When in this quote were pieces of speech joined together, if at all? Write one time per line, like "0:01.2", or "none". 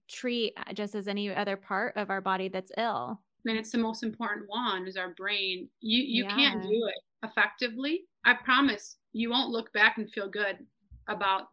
0:08.1